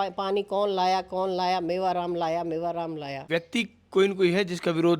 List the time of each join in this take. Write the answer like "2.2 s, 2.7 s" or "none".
3.2 s